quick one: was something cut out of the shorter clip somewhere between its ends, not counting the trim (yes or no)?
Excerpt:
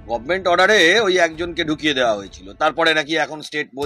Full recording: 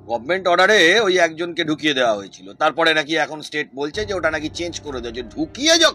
no